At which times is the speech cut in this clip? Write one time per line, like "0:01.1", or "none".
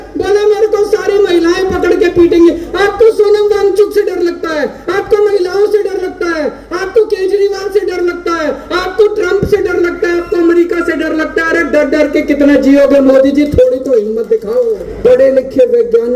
0:14.9